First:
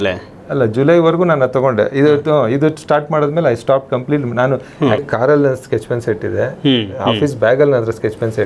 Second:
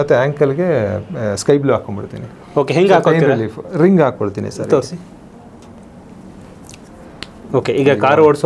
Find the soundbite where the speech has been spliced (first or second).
first